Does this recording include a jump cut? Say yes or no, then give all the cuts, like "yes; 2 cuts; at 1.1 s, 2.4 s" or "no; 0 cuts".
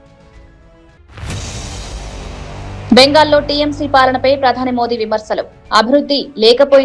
yes; 2 cuts; at 0.9 s, 2.9 s